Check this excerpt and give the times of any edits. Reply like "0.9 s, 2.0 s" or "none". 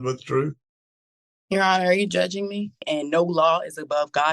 2.8 s